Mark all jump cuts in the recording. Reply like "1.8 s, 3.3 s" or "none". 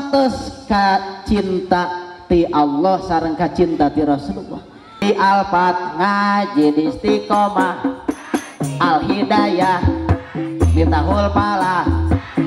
5.0 s